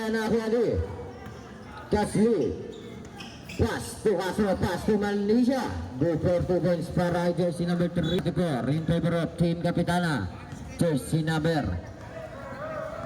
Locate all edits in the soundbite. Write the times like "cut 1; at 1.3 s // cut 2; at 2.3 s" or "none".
cut 1; at 8.2 s